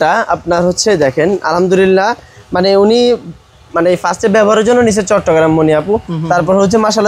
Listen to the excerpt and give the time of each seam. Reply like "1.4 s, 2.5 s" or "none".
none